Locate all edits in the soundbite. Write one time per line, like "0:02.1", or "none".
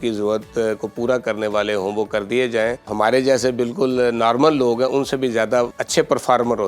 0:02.9
0:05.8